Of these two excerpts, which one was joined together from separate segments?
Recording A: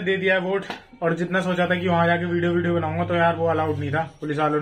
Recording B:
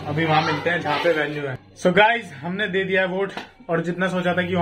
B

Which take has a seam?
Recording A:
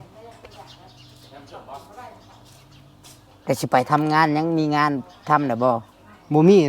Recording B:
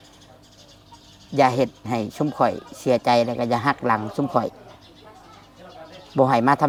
A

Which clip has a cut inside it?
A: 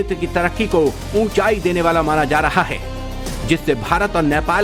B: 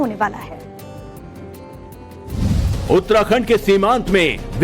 B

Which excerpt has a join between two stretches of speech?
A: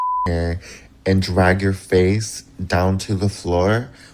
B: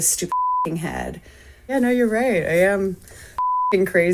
B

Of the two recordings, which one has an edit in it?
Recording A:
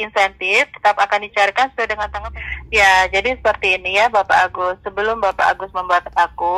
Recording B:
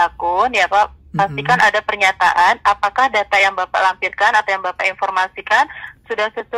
A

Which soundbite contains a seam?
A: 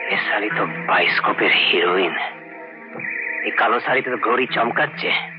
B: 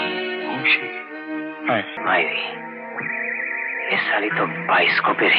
B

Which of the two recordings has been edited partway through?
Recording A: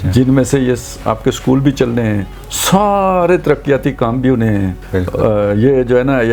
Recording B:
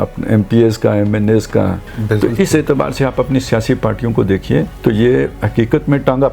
B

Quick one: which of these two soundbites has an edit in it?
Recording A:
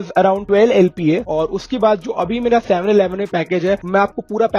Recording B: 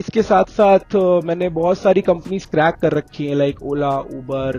A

